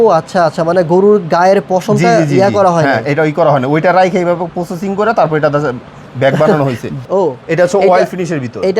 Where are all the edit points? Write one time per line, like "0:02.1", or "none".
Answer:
0:06.9